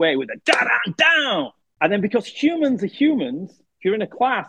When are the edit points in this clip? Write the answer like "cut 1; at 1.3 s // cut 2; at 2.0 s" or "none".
cut 1; at 1.6 s